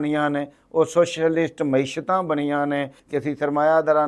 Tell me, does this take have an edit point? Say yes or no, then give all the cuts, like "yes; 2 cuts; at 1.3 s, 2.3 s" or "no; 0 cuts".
yes; 1 cut; at 3.0 s